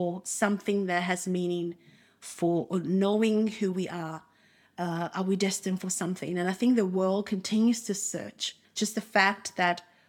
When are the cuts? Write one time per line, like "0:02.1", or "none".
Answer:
0:08.6